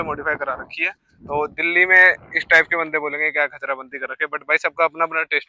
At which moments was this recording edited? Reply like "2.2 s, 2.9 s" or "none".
none